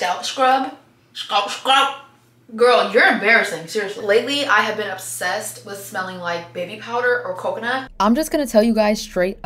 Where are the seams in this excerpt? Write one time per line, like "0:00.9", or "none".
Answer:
0:04.0
0:07.9